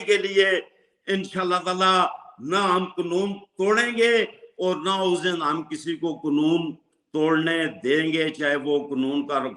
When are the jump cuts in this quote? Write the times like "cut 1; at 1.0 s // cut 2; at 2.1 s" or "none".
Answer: none